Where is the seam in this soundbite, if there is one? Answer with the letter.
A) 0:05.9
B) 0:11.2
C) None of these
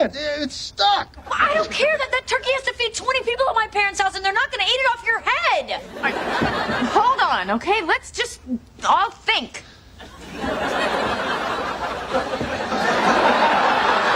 A